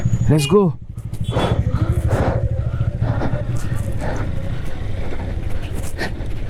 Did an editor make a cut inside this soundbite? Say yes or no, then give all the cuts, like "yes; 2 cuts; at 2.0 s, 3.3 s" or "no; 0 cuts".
no; 0 cuts